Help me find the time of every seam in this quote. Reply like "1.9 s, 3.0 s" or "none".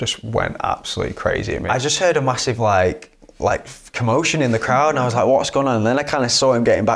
1.6 s